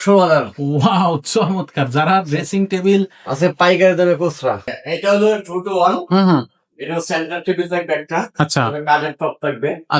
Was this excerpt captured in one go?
no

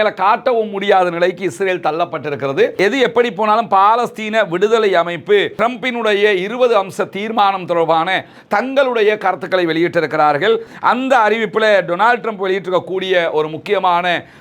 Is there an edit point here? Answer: yes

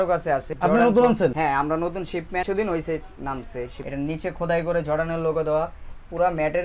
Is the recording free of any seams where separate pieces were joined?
no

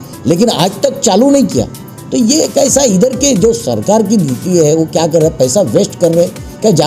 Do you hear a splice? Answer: no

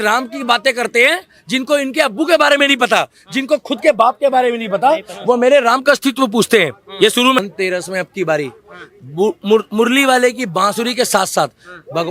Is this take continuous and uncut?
no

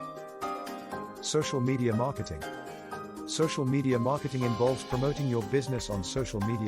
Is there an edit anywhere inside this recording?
no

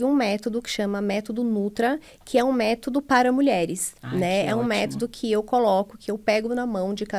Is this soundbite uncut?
yes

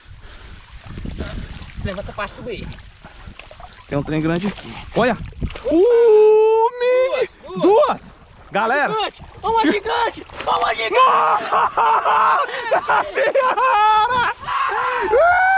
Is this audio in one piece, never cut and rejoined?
yes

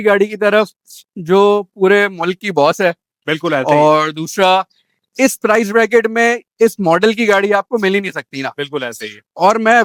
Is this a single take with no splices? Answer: yes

